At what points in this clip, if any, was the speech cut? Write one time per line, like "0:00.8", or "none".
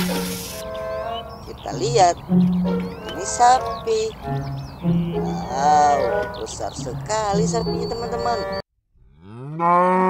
0:04.6
0:08.6